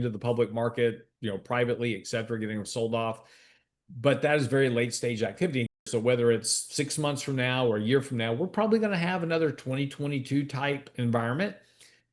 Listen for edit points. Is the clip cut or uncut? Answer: cut